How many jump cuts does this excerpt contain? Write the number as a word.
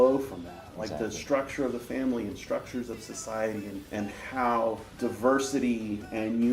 two